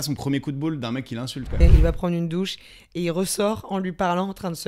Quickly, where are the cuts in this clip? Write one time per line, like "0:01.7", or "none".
0:01.6